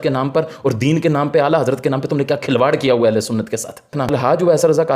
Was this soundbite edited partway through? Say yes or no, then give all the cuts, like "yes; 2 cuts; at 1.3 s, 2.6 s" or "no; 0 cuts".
yes; 1 cut; at 3.9 s